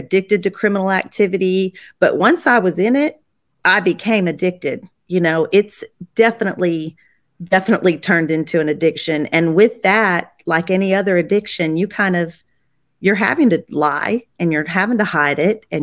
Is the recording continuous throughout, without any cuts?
yes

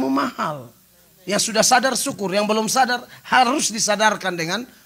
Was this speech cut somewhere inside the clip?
no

